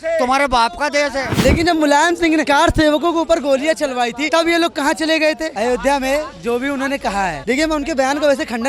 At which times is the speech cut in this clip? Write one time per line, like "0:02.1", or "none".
0:01.3
0:02.5
0:04.2
0:05.5
0:07.4